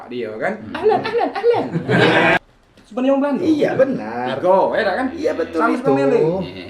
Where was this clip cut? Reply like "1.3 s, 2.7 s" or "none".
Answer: 2.4 s